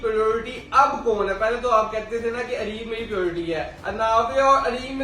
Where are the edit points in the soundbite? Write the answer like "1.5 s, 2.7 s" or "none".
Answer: none